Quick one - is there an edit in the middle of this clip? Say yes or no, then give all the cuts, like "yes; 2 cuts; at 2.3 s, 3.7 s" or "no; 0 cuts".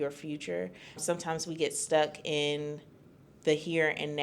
no; 0 cuts